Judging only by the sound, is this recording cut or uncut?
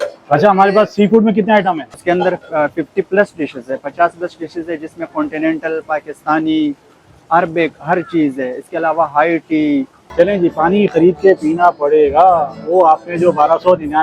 cut